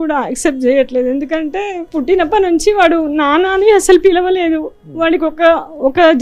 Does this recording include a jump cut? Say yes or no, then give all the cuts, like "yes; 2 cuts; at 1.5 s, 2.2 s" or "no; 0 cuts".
yes; 1 cut; at 1.8 s